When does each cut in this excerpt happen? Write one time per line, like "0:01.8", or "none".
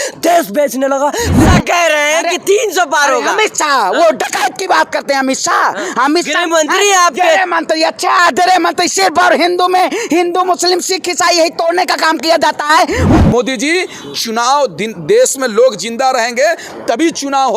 0:01.4
0:13.1